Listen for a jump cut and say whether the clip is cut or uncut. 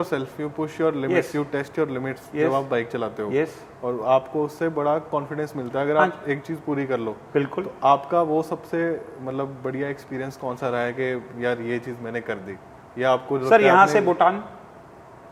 uncut